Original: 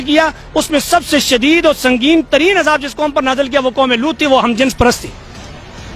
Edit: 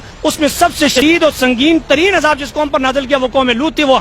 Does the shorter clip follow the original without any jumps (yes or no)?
no